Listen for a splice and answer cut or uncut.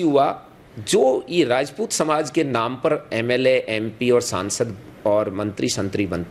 uncut